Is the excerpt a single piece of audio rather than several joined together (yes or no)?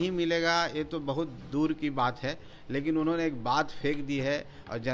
yes